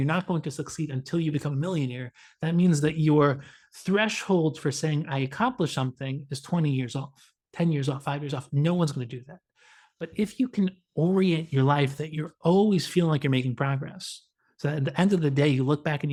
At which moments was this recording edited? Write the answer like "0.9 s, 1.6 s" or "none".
none